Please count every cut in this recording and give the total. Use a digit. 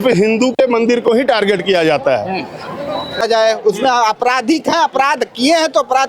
1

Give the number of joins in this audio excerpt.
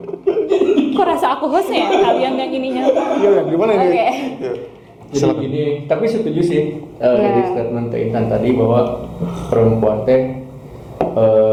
0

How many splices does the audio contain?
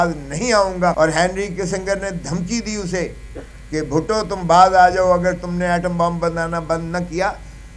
1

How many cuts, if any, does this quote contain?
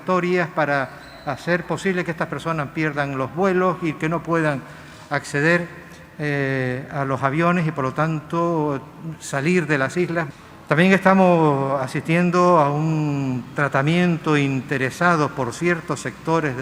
1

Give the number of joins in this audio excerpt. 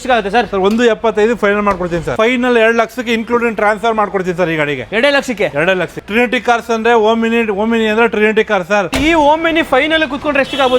3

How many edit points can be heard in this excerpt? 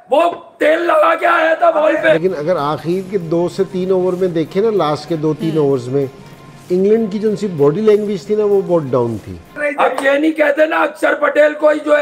2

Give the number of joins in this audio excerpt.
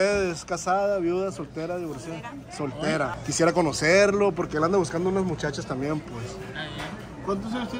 1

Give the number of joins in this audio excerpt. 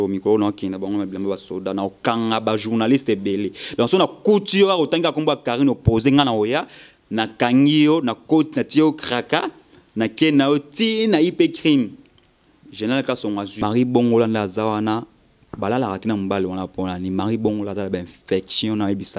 1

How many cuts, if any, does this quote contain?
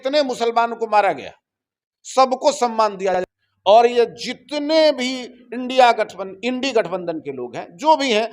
1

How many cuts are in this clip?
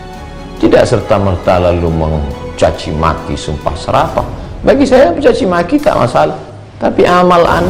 0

